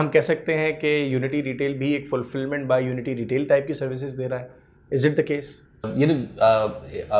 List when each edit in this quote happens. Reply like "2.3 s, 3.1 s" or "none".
5.9 s